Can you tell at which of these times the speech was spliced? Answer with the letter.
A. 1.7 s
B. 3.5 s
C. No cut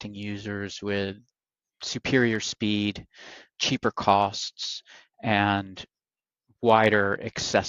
B